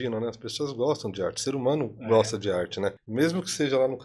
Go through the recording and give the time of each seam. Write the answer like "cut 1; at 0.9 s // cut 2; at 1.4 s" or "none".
cut 1; at 3.0 s